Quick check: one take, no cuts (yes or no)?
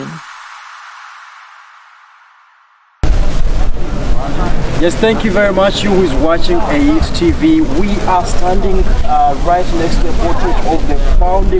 no